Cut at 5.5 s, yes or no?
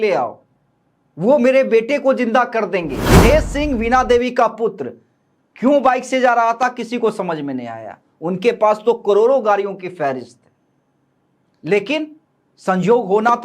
no